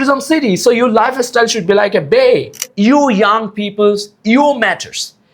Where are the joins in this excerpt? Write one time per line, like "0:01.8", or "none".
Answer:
0:02.7